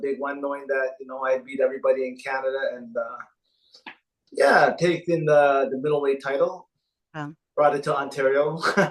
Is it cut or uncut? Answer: uncut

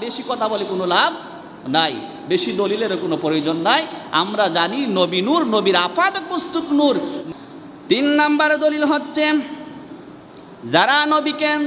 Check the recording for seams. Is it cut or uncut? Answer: cut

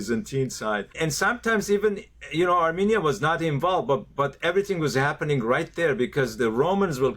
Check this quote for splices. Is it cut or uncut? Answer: cut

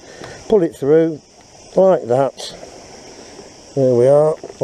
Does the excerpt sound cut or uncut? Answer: uncut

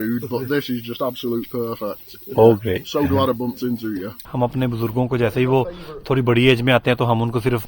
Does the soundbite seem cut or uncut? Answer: cut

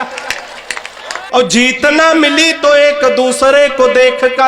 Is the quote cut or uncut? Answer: cut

